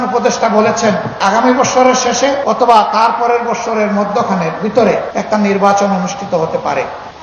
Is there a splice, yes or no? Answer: yes